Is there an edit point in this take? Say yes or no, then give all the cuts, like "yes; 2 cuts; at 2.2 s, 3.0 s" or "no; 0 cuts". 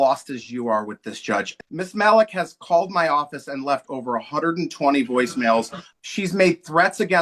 yes; 2 cuts; at 1.5 s, 5.8 s